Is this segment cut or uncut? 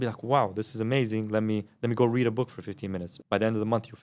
cut